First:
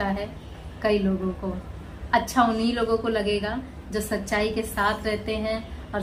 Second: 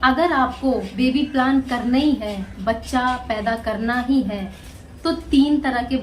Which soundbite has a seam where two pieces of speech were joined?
second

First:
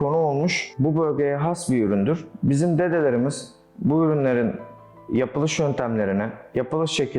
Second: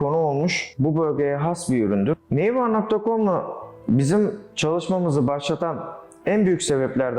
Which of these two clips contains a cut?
second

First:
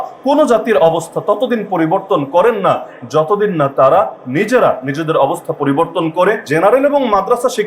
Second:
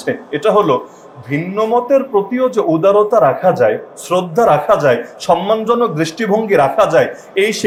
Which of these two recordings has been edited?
first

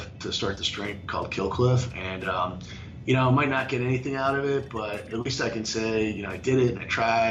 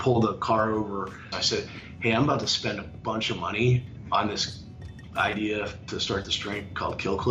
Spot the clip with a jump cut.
second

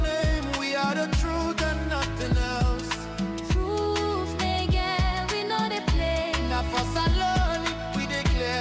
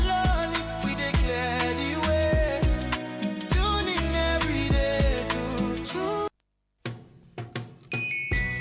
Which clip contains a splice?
second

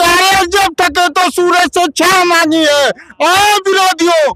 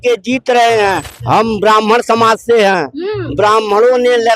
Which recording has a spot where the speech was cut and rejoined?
second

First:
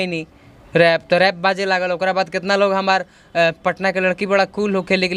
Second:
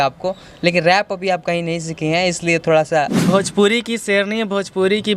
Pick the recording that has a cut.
second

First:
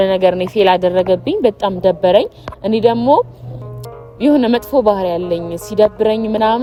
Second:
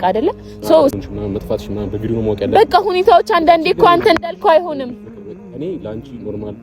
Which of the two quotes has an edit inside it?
second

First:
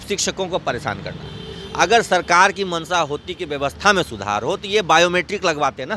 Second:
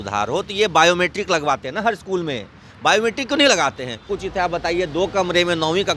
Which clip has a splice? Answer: second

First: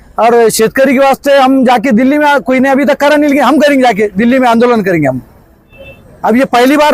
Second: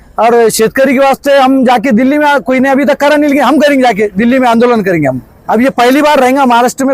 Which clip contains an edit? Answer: second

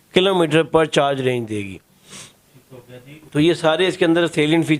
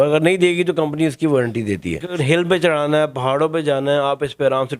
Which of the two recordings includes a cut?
second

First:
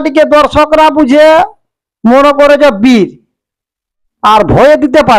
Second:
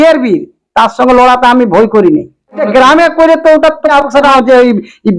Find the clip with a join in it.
second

